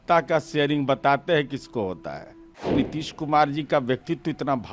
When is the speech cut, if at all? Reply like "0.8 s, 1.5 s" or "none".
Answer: 2.7 s